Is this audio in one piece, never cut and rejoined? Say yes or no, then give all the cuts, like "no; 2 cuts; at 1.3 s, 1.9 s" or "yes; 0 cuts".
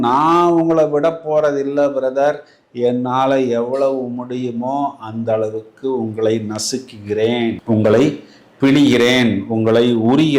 yes; 0 cuts